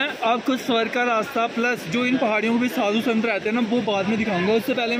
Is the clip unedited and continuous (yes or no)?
yes